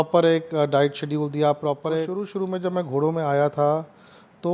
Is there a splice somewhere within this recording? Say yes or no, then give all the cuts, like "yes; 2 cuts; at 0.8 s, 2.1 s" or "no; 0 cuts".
yes; 1 cut; at 2.3 s